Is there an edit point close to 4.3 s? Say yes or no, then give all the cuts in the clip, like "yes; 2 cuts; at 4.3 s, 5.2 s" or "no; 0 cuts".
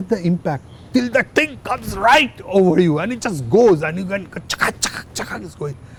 no; 0 cuts